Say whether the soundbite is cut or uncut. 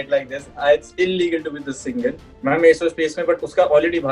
cut